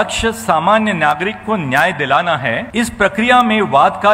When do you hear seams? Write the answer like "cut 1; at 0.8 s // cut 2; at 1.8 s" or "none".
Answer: cut 1; at 2.7 s